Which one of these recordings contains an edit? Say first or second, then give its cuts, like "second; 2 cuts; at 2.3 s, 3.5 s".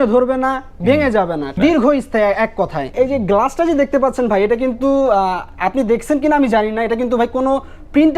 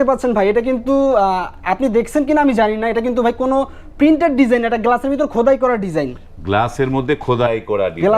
first; 2 cuts; at 1.5 s, 2.9 s